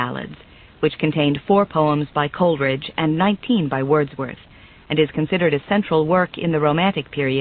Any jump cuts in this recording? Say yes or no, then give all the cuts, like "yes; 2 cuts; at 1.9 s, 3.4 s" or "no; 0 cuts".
yes; 1 cut; at 2.8 s